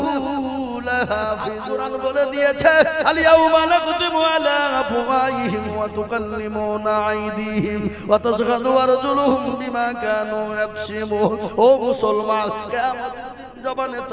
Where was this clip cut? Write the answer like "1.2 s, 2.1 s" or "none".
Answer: 1.7 s